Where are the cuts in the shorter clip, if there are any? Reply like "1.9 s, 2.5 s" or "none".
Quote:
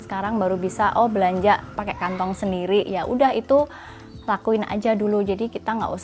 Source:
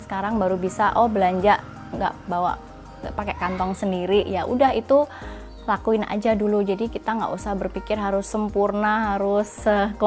1.7 s